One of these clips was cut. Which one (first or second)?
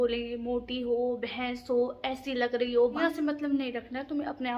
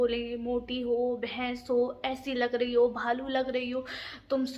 first